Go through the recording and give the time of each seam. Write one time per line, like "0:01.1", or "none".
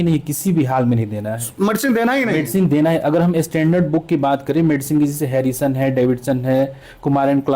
none